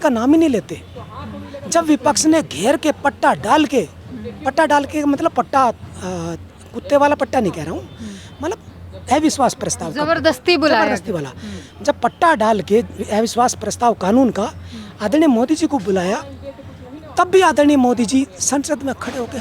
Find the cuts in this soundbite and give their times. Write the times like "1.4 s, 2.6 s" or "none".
none

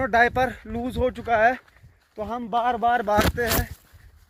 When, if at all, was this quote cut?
none

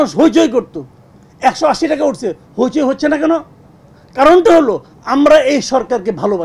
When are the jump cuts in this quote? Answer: none

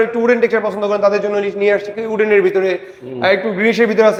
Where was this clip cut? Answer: none

